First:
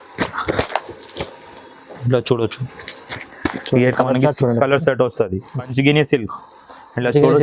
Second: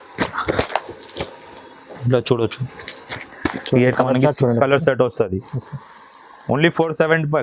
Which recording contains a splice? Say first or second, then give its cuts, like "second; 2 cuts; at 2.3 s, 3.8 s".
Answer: first; 1 cut; at 5.6 s